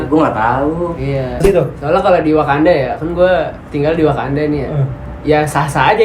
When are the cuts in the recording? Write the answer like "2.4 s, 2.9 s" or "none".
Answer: 1.4 s